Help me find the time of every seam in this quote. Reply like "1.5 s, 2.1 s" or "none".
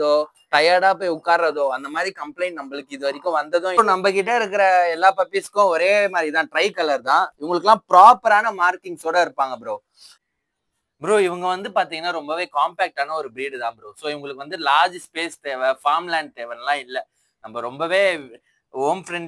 3.8 s, 10.2 s